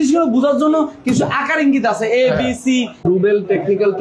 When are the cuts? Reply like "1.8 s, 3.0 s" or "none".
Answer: 3.0 s